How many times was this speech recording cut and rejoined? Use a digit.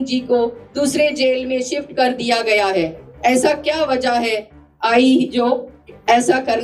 0